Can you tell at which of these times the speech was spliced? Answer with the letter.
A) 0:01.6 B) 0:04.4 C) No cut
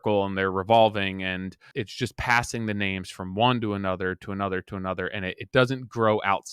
A